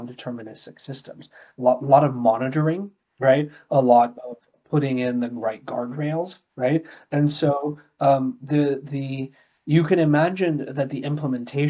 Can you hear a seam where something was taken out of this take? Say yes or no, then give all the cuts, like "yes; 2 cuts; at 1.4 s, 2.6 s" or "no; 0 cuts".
no; 0 cuts